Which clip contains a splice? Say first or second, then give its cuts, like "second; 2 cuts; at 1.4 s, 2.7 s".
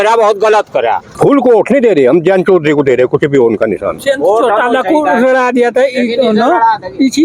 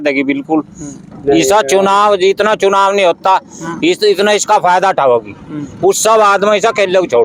first; 2 cuts; at 1.1 s, 4.0 s